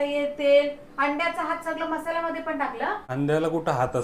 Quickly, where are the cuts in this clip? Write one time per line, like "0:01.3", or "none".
0:03.0